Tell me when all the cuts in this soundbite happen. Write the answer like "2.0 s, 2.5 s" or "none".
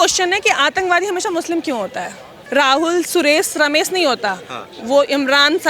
2.3 s